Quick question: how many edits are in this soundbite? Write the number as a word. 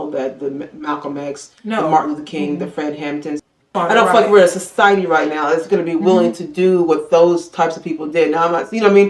one